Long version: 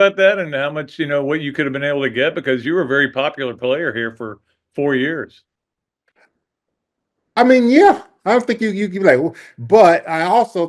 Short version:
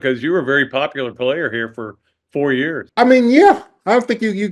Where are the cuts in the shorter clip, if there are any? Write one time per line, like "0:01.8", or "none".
0:02.9